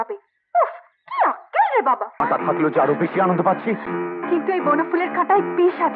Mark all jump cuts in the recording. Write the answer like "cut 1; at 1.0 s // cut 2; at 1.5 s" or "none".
cut 1; at 2.2 s